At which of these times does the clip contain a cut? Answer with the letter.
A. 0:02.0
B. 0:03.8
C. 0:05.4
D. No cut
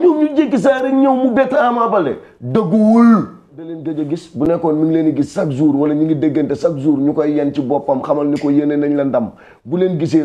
B